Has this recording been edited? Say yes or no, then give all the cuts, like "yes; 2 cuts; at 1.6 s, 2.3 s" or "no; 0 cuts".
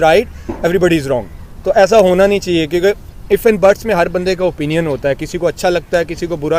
no; 0 cuts